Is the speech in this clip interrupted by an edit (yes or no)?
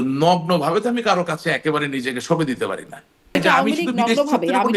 yes